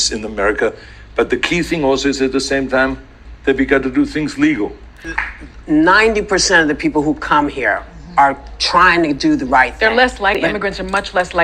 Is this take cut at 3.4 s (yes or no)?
no